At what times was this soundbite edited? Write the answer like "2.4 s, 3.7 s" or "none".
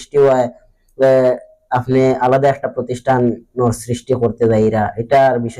none